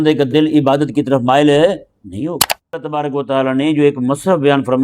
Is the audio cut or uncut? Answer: cut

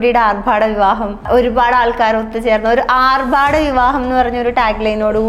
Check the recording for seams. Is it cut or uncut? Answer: cut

